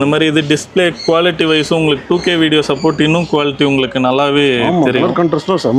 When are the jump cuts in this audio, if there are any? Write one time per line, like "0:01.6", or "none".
none